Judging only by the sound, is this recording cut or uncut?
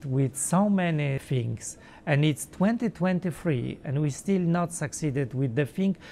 cut